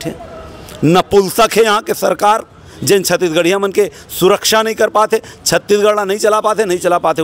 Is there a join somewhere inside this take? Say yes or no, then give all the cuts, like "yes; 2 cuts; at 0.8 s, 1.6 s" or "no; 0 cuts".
no; 0 cuts